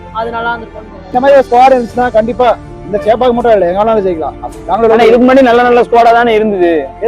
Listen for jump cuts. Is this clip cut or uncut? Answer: cut